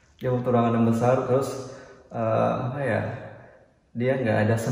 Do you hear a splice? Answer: no; 0 cuts

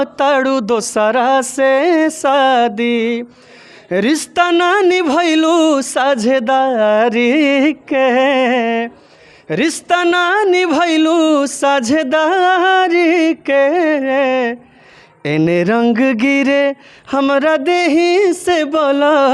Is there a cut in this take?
no; 0 cuts

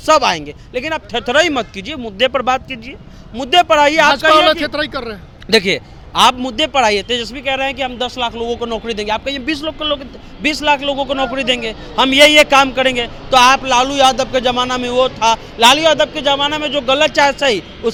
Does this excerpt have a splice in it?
no; 0 cuts

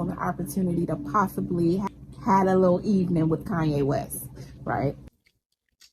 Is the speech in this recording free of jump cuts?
no; 1 cut; at 1.9 s

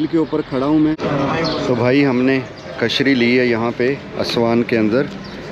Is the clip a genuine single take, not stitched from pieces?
no; 1 cut; at 1.3 s

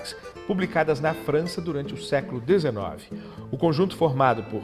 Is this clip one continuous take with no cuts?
yes; 0 cuts

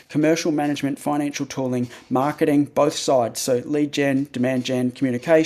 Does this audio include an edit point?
no; 0 cuts

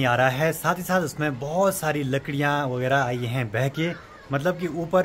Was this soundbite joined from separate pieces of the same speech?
no; 0 cuts

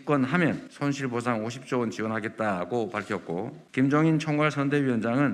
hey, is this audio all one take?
yes; 0 cuts

